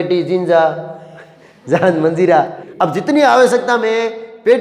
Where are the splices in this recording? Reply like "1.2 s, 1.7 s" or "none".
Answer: 2.6 s